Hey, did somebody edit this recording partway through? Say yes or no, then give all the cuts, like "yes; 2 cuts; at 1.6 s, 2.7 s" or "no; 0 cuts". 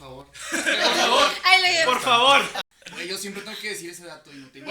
yes; 1 cut; at 2.6 s